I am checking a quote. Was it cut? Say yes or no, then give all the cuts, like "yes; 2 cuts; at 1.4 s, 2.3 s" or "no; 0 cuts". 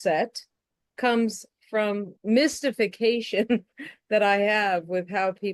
yes; 1 cut; at 2.1 s